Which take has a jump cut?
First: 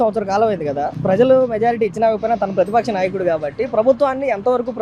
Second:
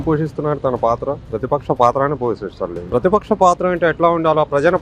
second; 1 cut; at 2.9 s

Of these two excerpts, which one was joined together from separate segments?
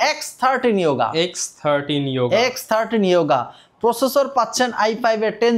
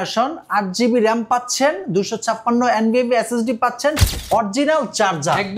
second; 1 cut; at 4.0 s

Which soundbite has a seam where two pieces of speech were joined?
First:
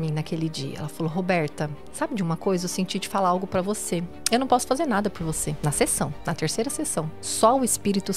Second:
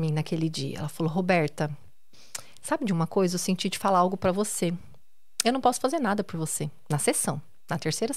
first; 5 cuts; at 1.8 s, 4.1 s, 5.6 s, 6.2 s, 7.2 s

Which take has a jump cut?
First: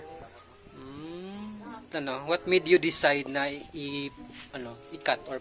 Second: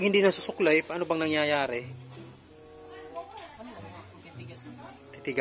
first; 1 cut; at 1.8 s

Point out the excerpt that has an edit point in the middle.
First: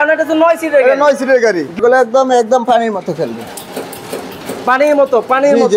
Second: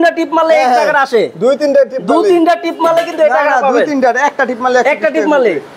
first; 1 cut; at 1.8 s

